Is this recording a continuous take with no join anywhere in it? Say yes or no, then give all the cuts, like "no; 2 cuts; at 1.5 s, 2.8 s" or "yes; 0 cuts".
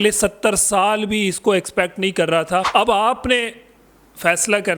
no; 1 cut; at 2.7 s